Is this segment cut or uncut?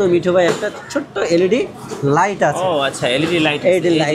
uncut